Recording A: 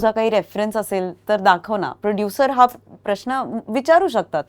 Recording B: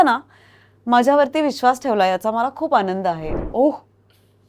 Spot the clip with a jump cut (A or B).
B